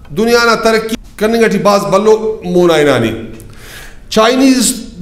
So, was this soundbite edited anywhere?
yes; 1 cut; at 1.0 s

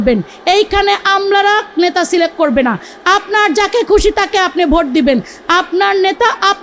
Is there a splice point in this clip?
no; 0 cuts

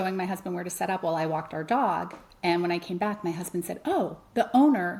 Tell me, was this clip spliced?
no; 0 cuts

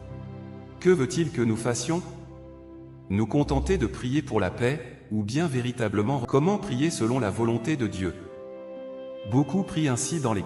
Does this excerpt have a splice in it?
yes; 1 cut; at 6.2 s

